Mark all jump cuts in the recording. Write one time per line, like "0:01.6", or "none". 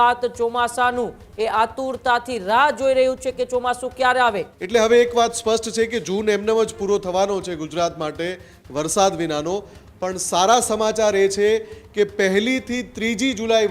0:04.5